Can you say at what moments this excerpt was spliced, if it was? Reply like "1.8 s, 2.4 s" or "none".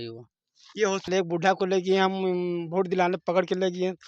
1.1 s